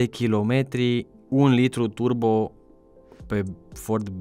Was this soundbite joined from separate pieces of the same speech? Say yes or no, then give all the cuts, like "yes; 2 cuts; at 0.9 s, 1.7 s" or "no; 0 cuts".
yes; 1 cut; at 1.2 s